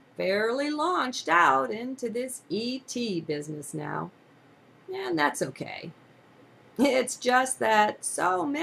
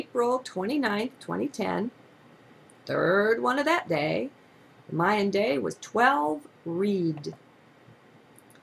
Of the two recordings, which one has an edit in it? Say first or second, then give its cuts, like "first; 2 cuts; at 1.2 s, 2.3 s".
first; 1 cut; at 1.6 s